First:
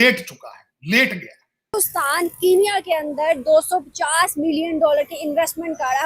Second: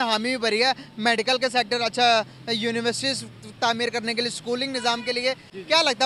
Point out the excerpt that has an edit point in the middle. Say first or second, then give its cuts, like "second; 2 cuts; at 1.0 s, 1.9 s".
first; 1 cut; at 1.7 s